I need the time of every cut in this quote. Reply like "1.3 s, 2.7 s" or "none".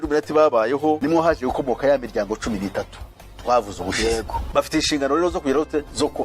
1.0 s, 4.5 s